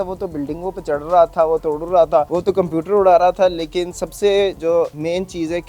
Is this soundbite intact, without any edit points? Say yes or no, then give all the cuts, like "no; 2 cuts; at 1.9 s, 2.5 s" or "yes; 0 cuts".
no; 2 cuts; at 2.3 s, 4.7 s